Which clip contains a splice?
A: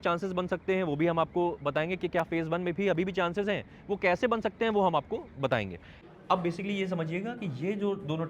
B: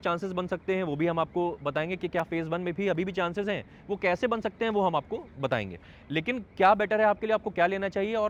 A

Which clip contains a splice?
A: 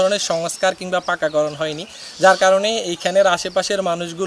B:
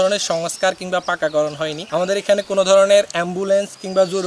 B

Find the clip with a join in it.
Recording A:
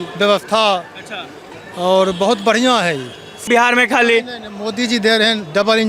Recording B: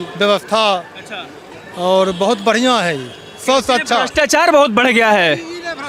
A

